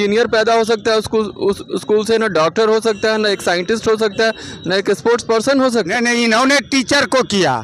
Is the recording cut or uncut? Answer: cut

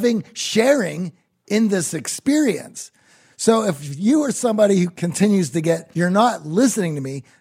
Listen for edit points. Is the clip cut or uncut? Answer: cut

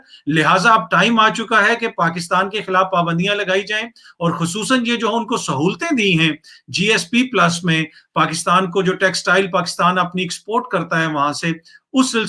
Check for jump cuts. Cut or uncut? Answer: uncut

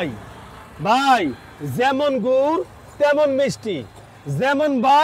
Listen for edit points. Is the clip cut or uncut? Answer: uncut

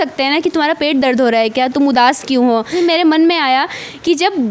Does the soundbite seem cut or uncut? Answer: cut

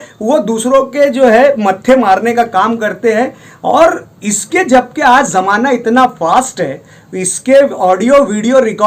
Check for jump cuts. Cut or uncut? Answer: uncut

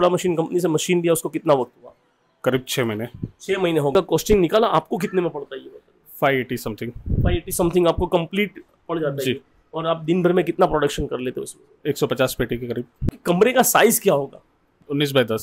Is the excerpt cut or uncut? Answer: cut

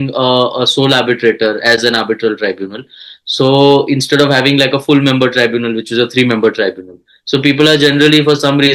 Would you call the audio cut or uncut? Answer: uncut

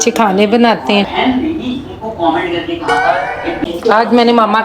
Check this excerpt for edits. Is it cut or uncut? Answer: cut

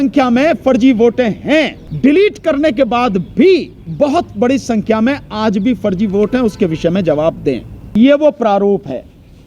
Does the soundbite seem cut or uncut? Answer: cut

